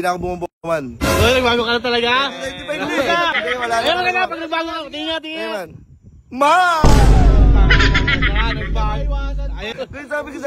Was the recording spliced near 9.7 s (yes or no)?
yes